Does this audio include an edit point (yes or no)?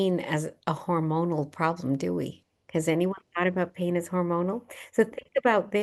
no